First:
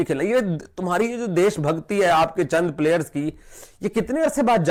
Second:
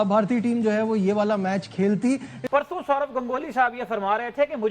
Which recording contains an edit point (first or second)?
second